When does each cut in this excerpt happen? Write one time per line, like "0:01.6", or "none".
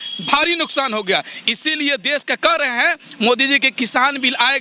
none

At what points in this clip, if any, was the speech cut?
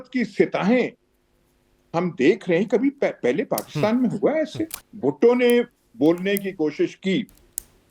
0:04.8

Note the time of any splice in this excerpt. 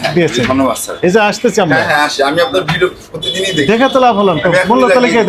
none

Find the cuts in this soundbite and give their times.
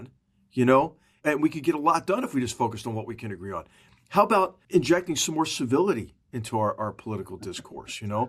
0:01.2
0:04.6

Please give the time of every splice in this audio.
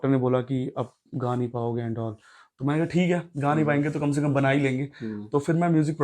none

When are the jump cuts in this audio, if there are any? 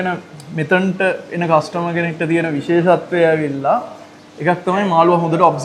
none

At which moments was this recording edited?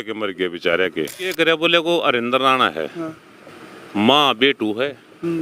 0:01.3

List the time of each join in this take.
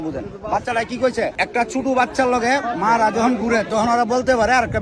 0:01.4

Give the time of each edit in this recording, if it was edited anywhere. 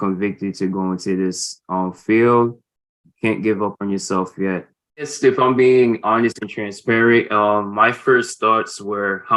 0:05.1

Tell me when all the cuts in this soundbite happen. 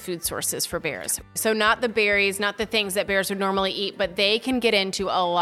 0:01.1

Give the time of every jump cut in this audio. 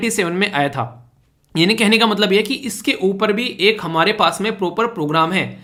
none

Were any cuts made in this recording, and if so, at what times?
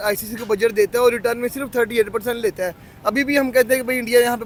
none

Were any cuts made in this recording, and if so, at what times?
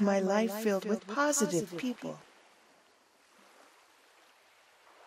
0:02.9

